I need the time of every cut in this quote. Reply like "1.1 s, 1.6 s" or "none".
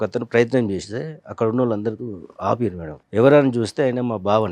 2.9 s